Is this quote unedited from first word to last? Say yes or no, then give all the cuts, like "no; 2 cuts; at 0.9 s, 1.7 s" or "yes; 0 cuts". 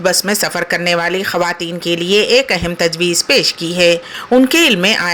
no; 1 cut; at 4.1 s